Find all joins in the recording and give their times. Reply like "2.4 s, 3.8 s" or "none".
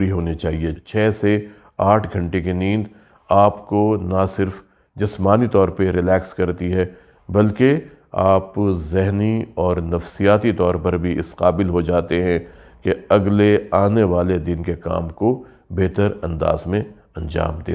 none